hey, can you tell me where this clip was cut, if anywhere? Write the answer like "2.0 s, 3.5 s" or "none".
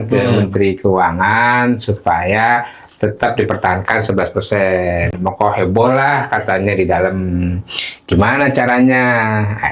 none